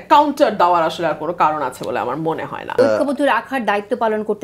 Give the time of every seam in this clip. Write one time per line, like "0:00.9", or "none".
0:02.8